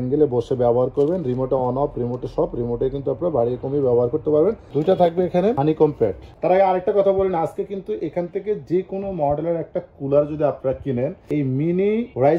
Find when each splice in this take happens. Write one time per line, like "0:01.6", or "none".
0:04.6
0:06.2